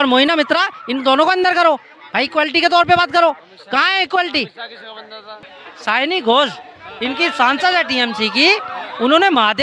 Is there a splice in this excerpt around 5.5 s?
yes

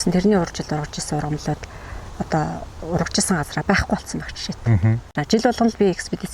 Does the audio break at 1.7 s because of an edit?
no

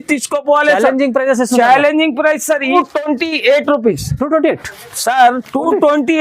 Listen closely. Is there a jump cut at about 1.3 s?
no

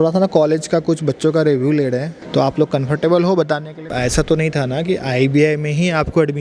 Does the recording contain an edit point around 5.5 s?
no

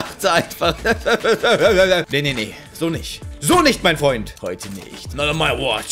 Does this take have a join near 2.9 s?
no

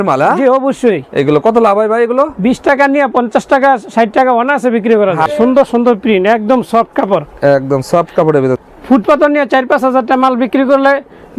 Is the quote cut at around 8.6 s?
yes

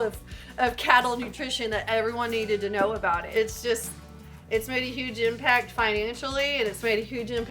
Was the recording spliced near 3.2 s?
yes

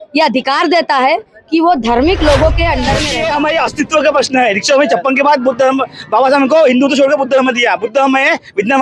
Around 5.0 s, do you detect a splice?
no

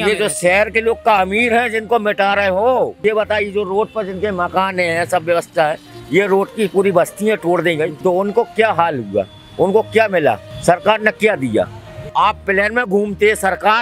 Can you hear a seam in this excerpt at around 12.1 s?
yes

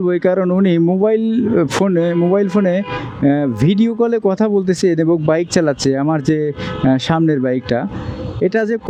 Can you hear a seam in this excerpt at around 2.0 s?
no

